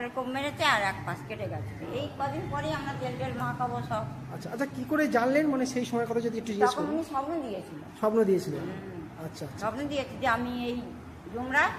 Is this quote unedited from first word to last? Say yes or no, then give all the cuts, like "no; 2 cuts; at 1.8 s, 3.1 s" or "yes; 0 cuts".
yes; 0 cuts